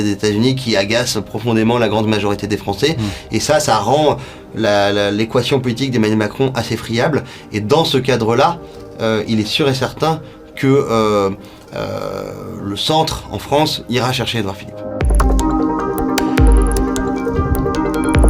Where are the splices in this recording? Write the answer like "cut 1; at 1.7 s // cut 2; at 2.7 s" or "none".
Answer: cut 1; at 14.7 s